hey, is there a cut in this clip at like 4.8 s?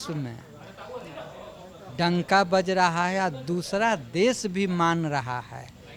no; 1 cut; at 1.9 s

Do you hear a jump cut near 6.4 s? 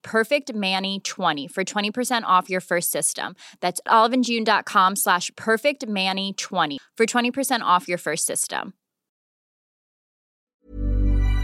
no; 1 cut; at 1.4 s

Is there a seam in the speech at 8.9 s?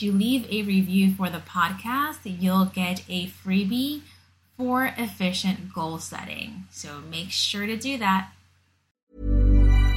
yes; 1 cut; at 8.9 s

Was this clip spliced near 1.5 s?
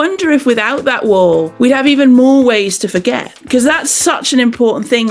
yes; 1 cut; at 1.5 s

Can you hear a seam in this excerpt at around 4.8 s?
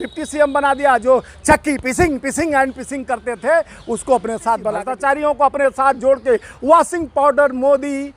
yes; 1 cut; at 4.8 s

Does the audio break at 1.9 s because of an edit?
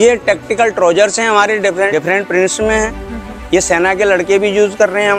yes; 1 cut; at 1.9 s

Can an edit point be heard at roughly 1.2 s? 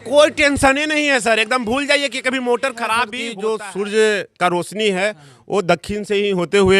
no; 1 cut; at 3.2 s

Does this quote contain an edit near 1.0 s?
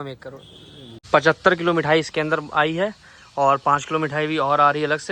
yes; 1 cut; at 1.0 s

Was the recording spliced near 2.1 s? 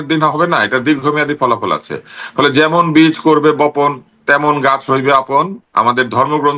no; 1 cut; at 5.6 s

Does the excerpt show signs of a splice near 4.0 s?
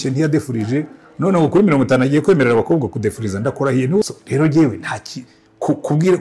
yes; 1 cut; at 4.0 s

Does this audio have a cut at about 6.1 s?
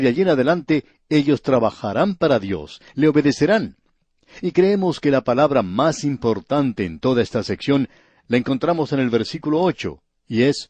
yes; 1 cut; at 6.1 s

